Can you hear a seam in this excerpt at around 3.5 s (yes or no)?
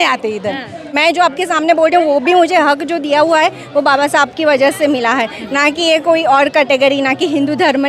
no